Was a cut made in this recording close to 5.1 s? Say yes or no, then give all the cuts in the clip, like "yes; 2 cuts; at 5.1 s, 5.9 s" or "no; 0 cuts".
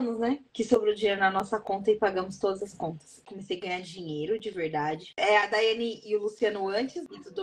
yes; 2 cuts; at 3.2 s, 5.1 s